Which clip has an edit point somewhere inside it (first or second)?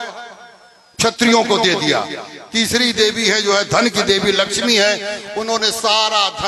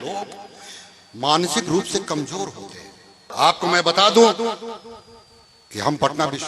second